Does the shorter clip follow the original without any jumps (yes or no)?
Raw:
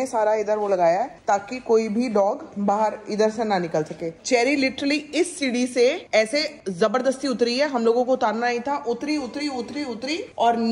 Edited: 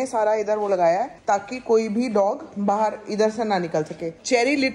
yes